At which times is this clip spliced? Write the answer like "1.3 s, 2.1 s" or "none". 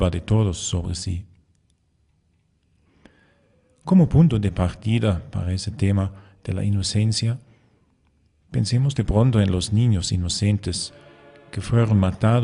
4.4 s

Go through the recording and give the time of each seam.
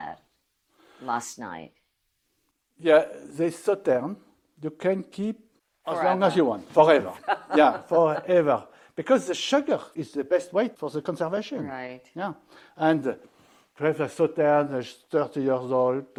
none

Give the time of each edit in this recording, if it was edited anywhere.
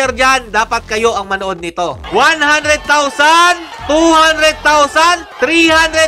2.0 s, 3.7 s, 5.3 s

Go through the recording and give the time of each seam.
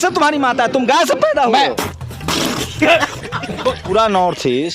1.7 s, 3.8 s

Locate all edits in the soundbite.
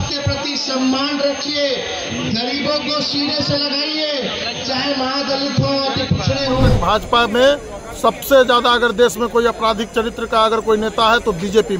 6.7 s

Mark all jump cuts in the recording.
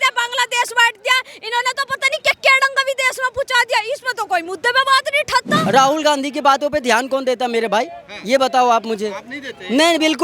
5.7 s

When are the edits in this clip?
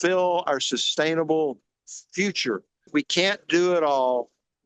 2.8 s

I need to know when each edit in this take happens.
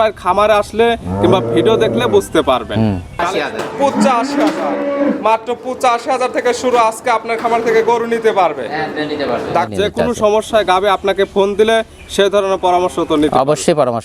3.2 s, 9.7 s

